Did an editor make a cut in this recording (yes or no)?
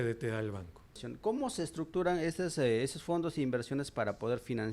yes